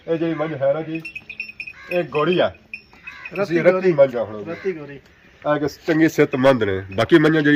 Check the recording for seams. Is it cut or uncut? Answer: uncut